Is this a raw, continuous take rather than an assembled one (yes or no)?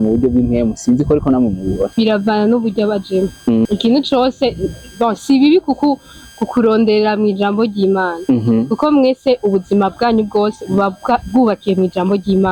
no